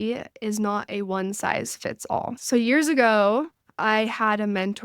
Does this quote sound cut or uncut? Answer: cut